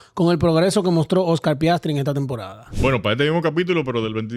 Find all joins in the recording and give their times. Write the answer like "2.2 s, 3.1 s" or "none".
2.7 s